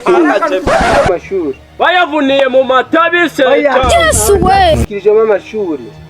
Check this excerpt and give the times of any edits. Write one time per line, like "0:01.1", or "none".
0:01.1